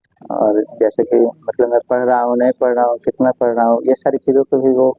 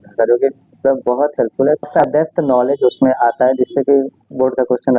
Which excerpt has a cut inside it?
second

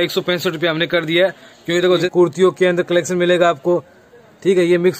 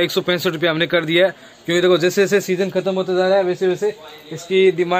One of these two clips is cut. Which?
first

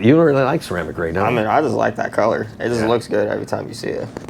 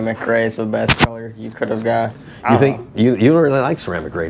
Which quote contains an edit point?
second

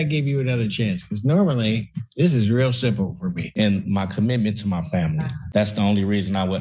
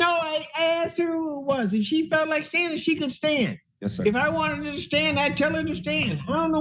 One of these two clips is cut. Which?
first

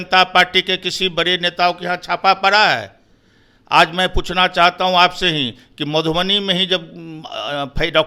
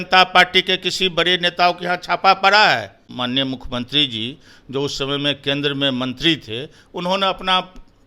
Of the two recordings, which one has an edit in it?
second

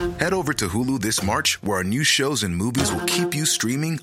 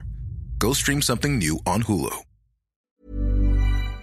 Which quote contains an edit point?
second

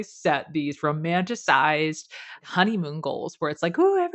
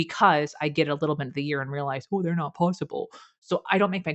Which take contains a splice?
first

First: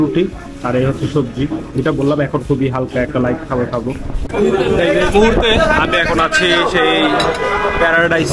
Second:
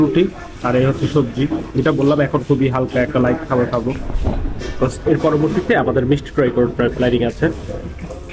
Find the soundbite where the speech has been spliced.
first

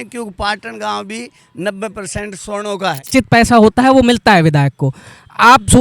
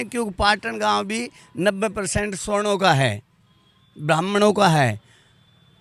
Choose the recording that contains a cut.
first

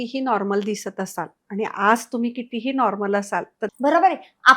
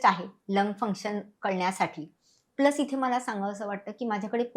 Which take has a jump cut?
first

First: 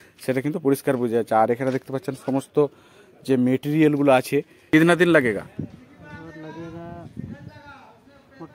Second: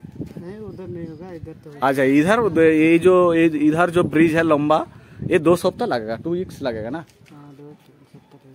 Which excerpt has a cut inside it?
first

